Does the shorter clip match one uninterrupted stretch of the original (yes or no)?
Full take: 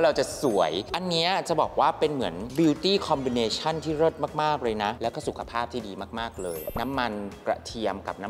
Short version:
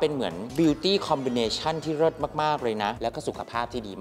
yes